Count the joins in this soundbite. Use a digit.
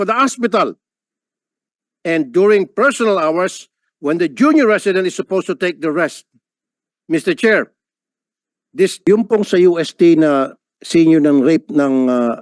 1